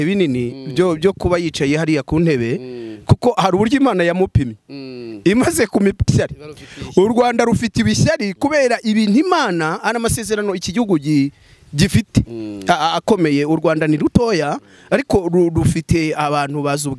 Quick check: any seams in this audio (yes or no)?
yes